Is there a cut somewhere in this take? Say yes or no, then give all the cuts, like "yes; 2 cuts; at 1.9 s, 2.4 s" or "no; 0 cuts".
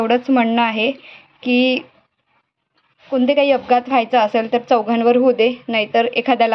no; 0 cuts